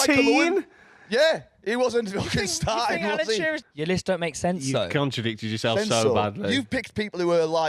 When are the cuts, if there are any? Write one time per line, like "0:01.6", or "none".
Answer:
0:03.6

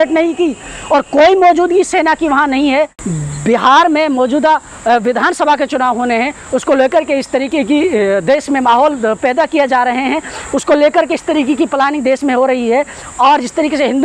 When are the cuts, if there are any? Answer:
0:03.0

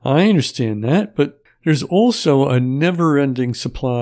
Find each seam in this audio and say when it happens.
0:01.5

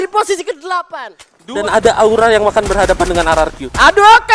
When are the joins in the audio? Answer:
0:01.6

